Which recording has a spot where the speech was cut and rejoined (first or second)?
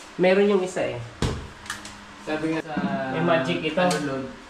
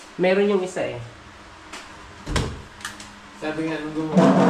first